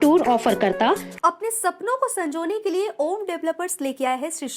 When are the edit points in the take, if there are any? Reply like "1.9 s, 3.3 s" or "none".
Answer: 1.1 s